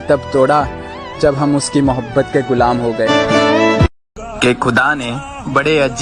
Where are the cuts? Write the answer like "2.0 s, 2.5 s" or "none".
4.0 s